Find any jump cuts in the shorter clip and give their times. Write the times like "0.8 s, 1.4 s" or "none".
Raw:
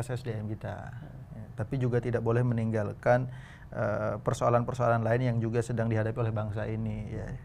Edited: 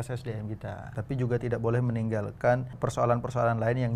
0.9 s, 2.7 s

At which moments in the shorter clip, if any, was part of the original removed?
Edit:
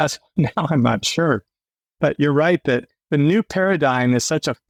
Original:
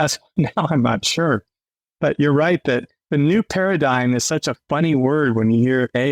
none

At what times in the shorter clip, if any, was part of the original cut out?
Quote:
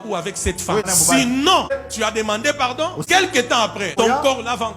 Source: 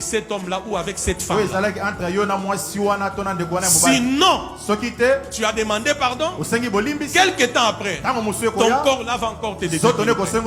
0.9 s, 1.7 s, 3.0 s, 3.9 s

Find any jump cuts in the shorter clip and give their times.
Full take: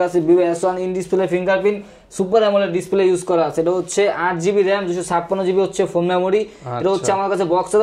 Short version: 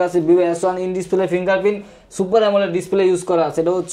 none

